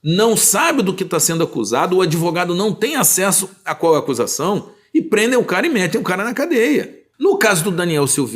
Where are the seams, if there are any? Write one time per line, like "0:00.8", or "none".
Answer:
0:07.0